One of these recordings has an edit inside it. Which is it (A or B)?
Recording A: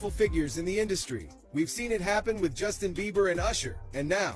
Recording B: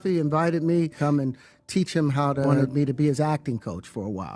B